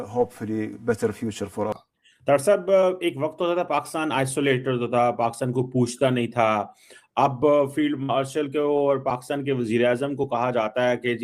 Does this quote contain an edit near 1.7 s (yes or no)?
yes